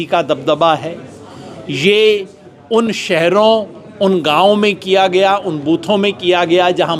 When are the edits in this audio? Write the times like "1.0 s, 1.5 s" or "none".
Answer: none